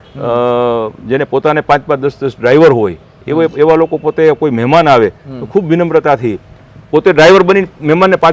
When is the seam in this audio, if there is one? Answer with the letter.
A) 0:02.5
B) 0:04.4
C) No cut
C